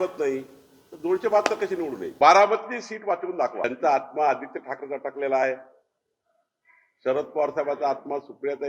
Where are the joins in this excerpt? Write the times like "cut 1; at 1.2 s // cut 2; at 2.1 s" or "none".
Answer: cut 1; at 3.7 s